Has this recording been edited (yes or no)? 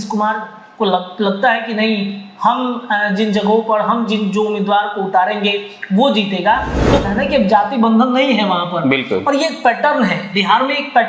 yes